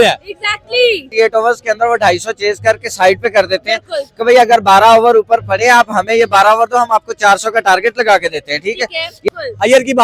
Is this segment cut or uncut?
cut